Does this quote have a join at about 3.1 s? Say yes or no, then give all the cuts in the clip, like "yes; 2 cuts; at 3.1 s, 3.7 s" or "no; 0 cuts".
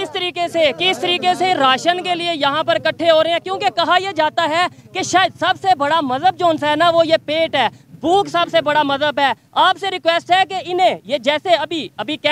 no; 0 cuts